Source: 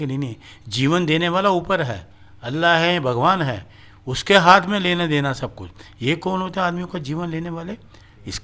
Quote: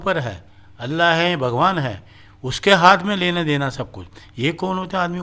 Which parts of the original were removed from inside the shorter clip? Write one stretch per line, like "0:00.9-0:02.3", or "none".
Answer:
none